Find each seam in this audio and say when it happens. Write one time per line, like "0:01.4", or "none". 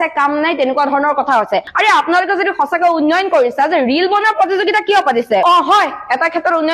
0:01.7
0:05.4